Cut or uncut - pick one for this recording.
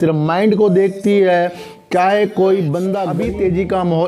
cut